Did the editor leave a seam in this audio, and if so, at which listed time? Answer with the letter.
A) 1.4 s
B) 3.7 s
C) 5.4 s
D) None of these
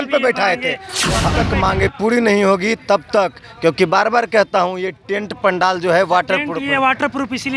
A